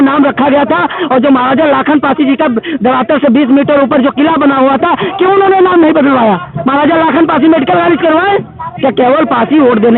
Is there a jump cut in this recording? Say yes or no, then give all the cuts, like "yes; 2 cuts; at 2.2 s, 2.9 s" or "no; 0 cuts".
no; 0 cuts